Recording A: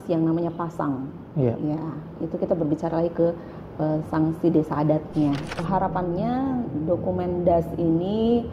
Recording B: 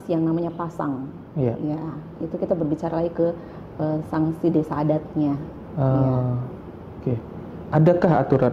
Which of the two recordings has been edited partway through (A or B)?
A